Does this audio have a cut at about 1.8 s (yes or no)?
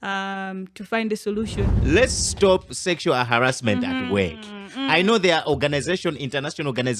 yes